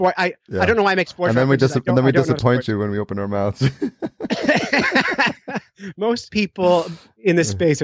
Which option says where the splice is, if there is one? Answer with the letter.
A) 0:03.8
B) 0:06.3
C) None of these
B